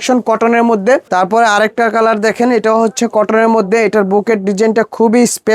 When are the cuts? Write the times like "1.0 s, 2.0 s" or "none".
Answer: 1.1 s